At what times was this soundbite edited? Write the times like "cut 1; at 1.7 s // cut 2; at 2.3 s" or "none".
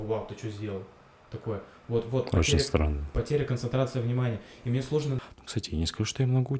cut 1; at 5.2 s